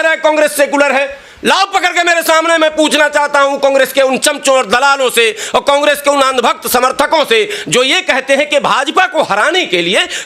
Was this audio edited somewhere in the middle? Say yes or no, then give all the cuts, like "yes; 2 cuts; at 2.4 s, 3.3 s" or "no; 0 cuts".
no; 0 cuts